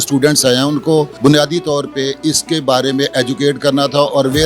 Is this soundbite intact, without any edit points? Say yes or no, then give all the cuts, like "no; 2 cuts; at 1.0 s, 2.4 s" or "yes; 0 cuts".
no; 1 cut; at 1.1 s